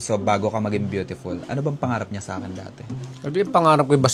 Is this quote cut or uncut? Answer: uncut